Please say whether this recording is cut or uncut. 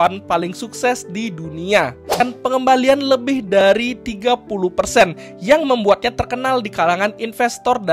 cut